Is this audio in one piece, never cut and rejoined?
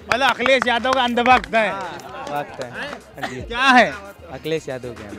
yes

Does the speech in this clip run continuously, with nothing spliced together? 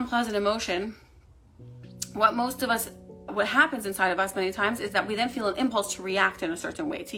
yes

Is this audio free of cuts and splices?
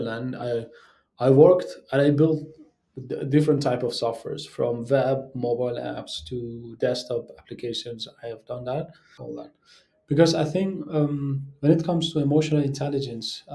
no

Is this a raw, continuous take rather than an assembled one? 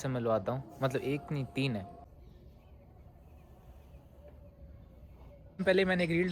no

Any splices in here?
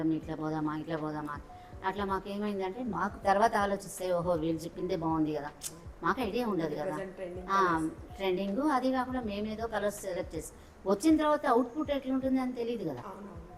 no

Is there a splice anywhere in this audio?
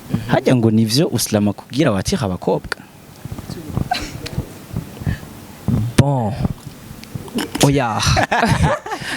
no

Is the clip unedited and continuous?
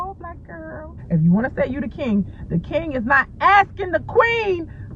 no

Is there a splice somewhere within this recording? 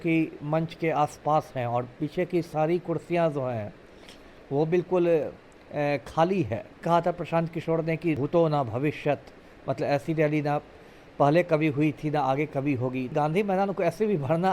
yes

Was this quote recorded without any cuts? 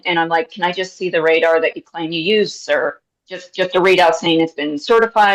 yes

